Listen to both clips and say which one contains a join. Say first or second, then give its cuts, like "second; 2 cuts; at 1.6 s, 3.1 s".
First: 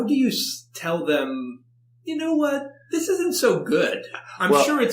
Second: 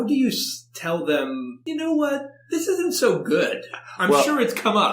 second; 1 cut; at 1.5 s